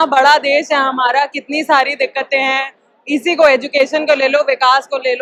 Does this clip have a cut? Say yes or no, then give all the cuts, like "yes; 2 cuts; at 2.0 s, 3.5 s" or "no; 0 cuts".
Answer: no; 0 cuts